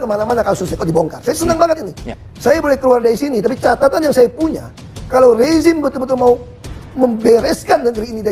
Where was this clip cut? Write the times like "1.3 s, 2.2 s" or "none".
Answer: 1.9 s